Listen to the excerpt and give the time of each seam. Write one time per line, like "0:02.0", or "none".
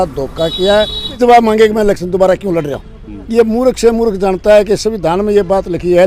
0:01.2
0:03.2